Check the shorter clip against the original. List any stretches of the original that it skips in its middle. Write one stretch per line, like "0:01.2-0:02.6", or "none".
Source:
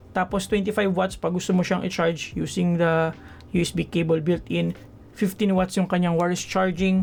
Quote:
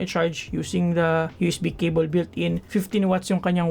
0:03.1-0:03.4
0:04.8-0:05.1

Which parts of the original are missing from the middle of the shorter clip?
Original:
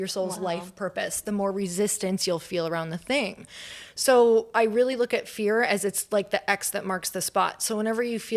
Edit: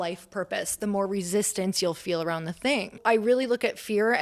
0:03.4-0:04.5

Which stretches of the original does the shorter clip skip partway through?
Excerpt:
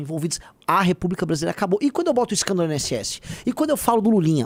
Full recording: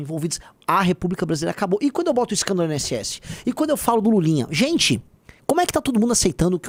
none

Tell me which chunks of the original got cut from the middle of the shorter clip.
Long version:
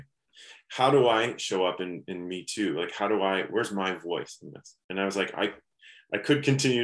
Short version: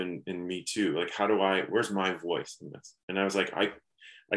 none

